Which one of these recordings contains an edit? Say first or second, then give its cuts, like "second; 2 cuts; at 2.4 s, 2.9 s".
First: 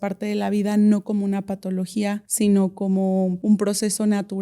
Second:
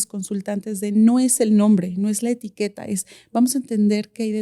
first; 2 cuts; at 2.3 s, 3.4 s